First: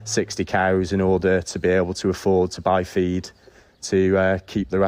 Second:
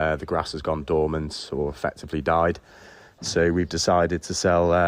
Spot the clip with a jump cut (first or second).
second